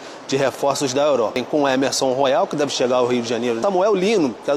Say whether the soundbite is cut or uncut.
cut